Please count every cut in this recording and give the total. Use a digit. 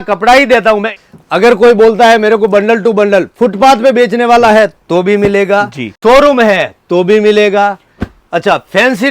2